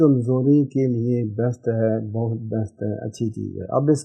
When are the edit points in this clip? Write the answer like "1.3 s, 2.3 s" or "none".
none